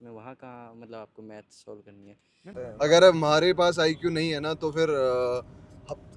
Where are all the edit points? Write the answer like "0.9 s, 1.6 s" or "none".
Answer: 2.6 s